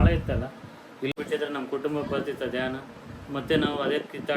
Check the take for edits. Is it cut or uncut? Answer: cut